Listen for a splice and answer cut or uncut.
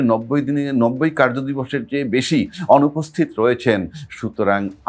uncut